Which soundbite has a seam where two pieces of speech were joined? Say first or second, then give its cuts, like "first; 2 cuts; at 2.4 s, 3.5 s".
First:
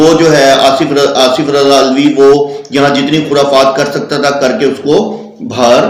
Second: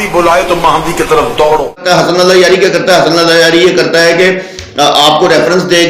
second; 1 cut; at 1.8 s